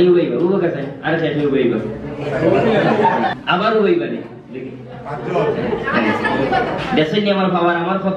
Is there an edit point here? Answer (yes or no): yes